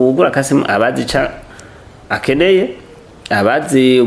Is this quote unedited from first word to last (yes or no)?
yes